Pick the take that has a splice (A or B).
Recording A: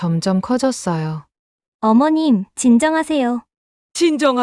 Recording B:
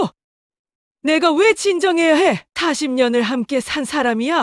B